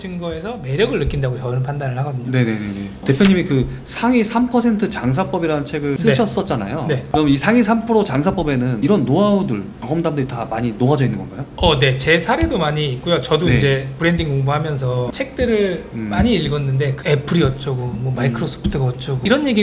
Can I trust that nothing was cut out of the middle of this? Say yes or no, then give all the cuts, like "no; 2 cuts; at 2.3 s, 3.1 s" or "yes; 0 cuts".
no; 1 cut; at 2.9 s